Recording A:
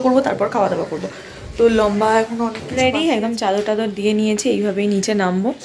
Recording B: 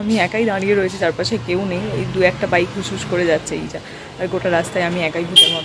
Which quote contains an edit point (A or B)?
A